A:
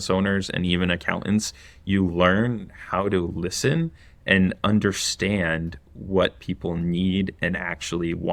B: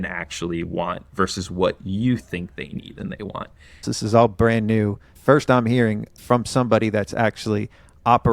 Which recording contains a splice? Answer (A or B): B